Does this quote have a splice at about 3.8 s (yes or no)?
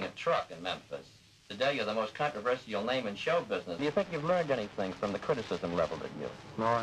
yes